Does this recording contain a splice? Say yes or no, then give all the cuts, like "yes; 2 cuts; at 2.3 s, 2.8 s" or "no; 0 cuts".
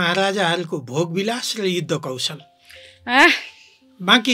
no; 0 cuts